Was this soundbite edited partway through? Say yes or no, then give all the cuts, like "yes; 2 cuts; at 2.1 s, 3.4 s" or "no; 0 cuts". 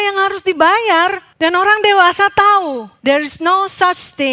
yes; 2 cuts; at 1.3 s, 2.9 s